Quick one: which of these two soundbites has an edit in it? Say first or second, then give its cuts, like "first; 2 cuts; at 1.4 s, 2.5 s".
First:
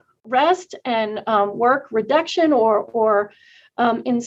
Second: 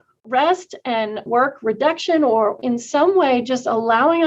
second; 2 cuts; at 1.2 s, 2.6 s